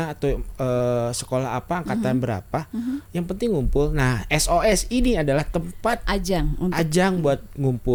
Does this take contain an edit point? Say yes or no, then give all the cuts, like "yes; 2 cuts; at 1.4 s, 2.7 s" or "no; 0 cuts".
no; 0 cuts